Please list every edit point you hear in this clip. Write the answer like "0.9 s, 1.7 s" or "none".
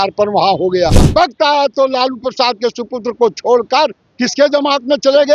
1.0 s